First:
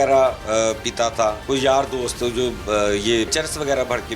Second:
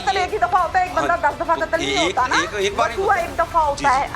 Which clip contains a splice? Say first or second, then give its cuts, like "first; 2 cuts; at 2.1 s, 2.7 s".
first; 2 cuts; at 1.4 s, 3.3 s